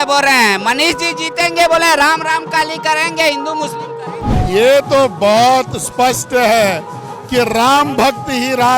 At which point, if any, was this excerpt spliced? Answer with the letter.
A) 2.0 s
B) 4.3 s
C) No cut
B